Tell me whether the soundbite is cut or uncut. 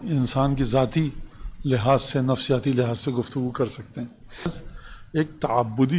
cut